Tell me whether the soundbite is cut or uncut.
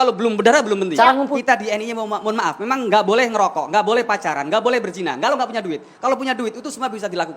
cut